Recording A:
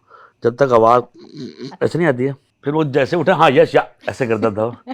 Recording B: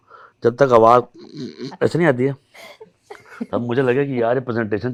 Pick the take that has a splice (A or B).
A